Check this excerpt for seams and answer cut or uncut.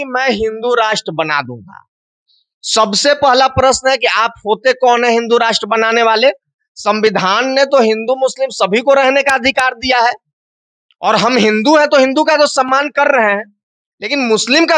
uncut